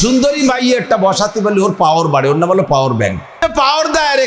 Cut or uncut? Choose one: cut